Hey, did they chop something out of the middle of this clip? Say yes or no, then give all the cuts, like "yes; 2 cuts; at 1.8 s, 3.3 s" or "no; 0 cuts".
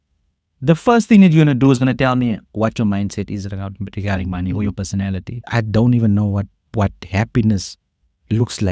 yes; 1 cut; at 5.5 s